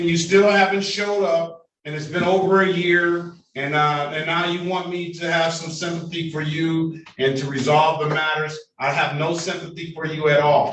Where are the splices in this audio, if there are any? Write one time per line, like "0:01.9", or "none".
none